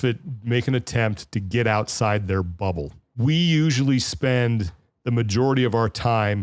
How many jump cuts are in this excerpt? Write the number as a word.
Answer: one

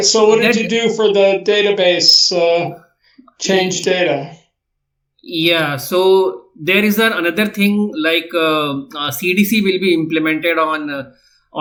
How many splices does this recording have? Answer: zero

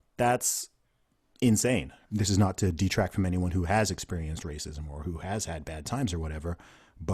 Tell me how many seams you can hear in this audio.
one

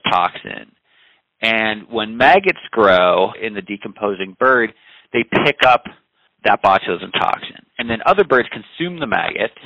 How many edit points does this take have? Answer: two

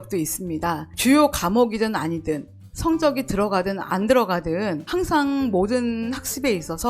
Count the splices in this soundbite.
one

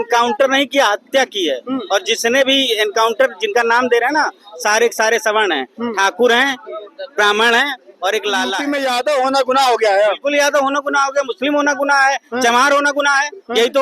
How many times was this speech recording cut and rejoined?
one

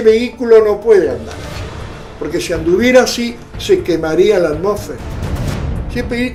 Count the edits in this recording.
zero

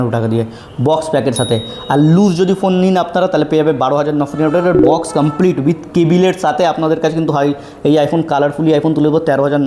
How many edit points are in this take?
zero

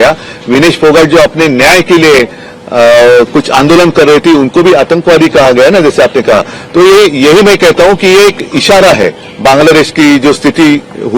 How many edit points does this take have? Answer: zero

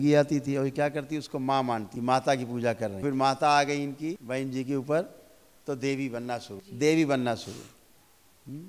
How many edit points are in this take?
four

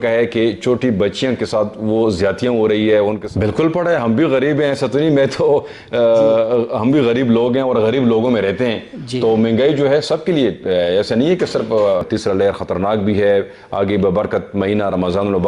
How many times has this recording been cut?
two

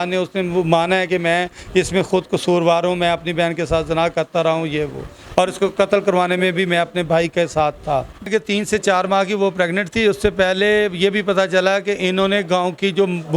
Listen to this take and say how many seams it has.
one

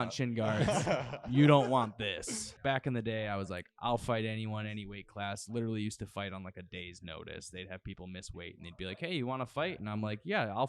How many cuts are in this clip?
one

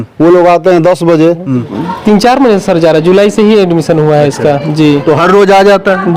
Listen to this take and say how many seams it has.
one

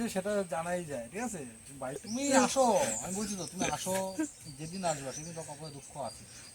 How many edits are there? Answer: one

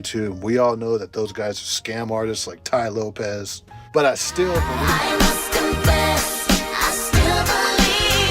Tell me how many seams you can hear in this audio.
one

